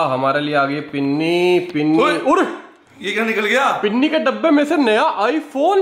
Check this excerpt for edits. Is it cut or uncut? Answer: uncut